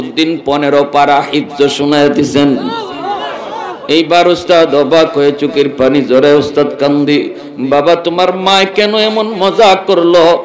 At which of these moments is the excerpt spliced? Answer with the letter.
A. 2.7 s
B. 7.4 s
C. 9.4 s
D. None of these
D